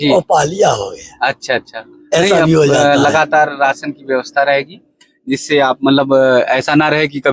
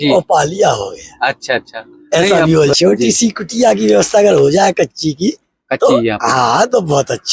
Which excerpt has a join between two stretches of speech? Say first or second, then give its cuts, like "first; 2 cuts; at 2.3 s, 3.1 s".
second; 1 cut; at 2.7 s